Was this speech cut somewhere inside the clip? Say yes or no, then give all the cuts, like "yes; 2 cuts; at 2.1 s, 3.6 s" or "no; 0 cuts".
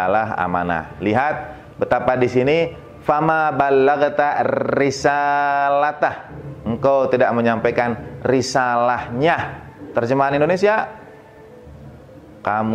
no; 0 cuts